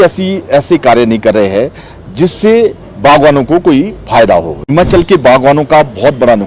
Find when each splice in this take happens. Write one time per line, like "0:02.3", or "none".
0:04.7